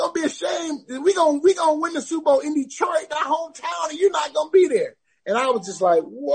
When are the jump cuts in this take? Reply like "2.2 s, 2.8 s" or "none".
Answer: none